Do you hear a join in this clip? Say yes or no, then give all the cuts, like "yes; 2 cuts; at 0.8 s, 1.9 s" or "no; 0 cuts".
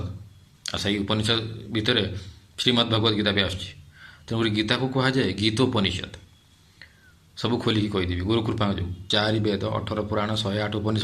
yes; 1 cut; at 9.0 s